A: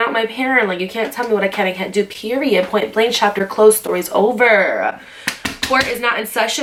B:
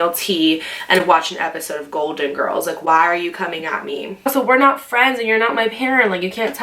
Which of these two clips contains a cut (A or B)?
B